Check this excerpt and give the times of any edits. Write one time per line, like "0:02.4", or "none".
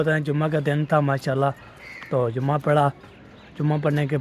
none